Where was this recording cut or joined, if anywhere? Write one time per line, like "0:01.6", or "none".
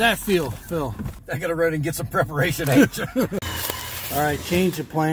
0:01.2
0:03.4